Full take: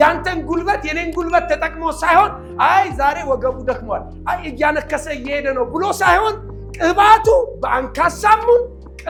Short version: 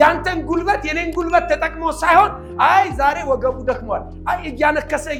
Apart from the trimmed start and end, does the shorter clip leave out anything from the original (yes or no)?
no